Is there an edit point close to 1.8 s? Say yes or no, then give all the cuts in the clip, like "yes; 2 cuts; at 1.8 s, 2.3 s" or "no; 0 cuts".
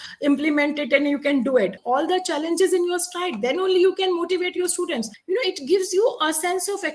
yes; 2 cuts; at 1.8 s, 5.1 s